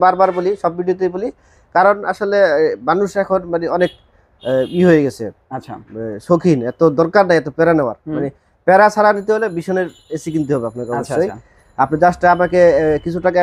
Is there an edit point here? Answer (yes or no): no